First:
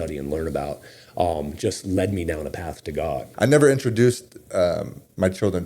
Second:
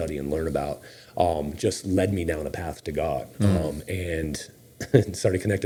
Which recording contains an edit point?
first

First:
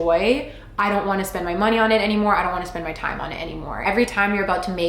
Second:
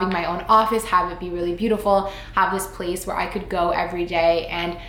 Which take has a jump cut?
first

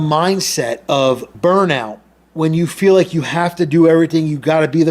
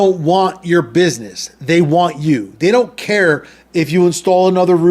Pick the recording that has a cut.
first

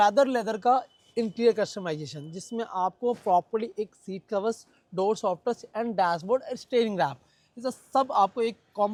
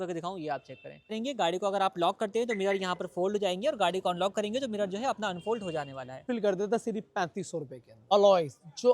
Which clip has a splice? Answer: second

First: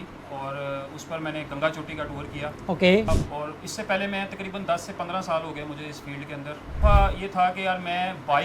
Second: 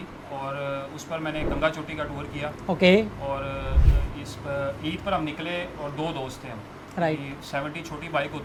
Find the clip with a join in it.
first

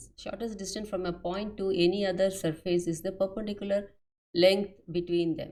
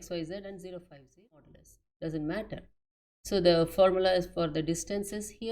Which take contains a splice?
second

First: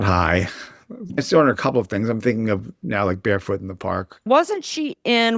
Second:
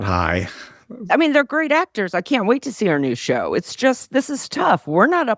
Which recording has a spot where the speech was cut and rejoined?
first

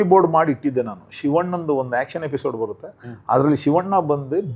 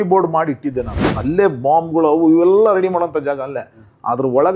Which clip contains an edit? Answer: second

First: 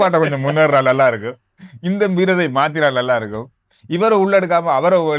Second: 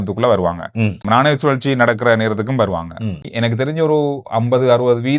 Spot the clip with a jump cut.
second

